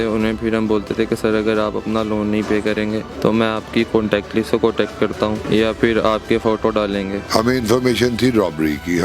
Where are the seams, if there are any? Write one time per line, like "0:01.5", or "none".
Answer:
0:03.1
0:05.4
0:07.2